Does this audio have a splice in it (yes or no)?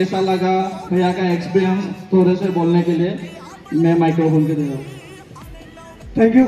no